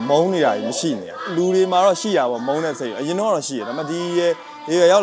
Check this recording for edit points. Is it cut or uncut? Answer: cut